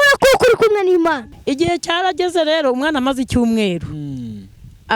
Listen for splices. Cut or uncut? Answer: cut